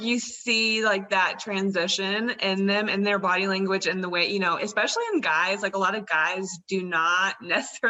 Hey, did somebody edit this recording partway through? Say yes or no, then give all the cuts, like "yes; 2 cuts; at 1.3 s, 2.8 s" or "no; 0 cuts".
no; 0 cuts